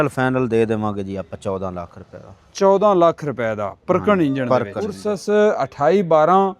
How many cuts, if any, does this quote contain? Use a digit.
1